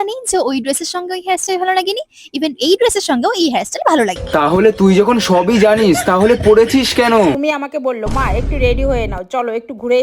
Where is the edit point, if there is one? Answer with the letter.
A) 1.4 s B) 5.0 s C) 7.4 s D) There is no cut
C